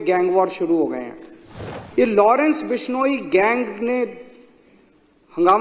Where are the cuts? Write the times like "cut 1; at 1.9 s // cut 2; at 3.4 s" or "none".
cut 1; at 1.8 s